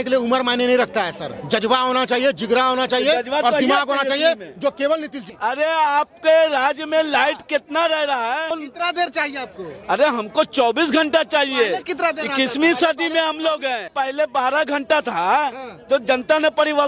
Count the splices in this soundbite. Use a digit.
3